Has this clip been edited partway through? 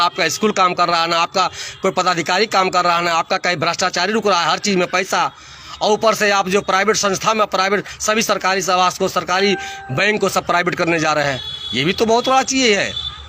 no; 0 cuts

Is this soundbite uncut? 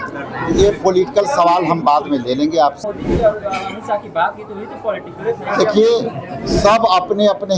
no; 1 cut; at 2.9 s

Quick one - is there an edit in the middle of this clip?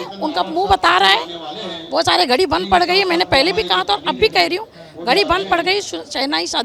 no; 0 cuts

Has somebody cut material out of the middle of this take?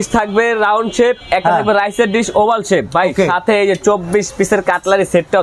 no; 0 cuts

